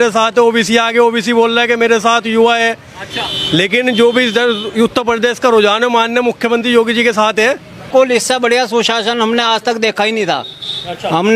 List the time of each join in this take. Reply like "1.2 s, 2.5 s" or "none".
7.8 s